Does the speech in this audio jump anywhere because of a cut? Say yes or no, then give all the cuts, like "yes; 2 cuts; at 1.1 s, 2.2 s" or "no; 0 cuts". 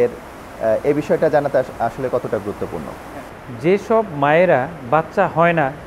yes; 1 cut; at 3.2 s